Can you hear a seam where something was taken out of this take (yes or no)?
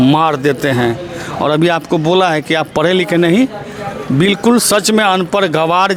no